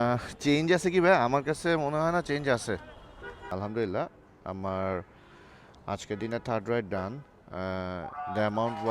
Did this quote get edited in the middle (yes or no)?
yes